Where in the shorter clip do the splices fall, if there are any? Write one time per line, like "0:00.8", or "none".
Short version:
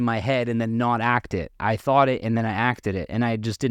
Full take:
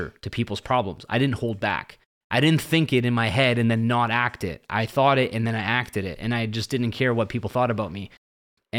none